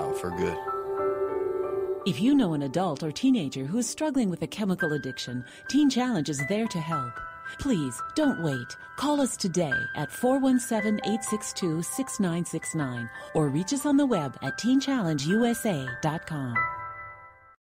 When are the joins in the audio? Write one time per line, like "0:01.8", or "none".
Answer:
none